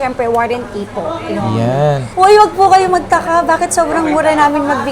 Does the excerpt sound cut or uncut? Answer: cut